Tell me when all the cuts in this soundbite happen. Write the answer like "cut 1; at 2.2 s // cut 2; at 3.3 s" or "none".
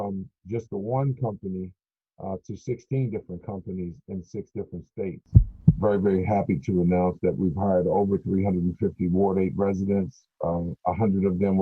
cut 1; at 5.6 s